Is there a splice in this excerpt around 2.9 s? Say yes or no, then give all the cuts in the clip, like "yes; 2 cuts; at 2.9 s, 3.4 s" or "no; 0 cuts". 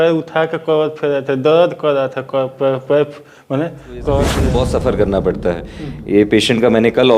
no; 1 cut; at 4.4 s